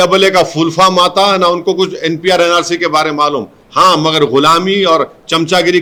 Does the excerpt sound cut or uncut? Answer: uncut